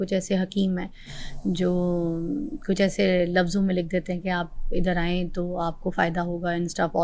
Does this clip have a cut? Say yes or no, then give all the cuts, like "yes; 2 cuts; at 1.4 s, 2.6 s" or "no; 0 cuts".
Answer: no; 0 cuts